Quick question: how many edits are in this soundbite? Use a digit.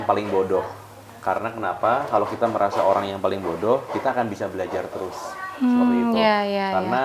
0